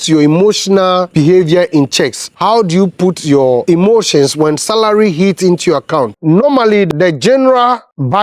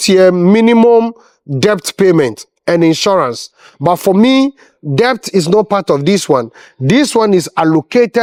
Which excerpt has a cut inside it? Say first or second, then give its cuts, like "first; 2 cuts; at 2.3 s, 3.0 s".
first; 2 cuts; at 6.1 s, 6.9 s